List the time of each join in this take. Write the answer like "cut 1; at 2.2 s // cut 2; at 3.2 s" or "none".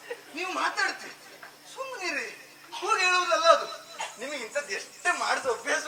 cut 1; at 4.1 s